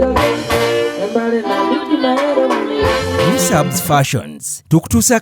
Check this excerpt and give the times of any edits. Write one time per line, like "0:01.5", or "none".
0:03.5